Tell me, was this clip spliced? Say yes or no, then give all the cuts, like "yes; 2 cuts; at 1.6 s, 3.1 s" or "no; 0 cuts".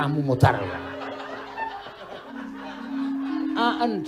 yes; 1 cut; at 2.3 s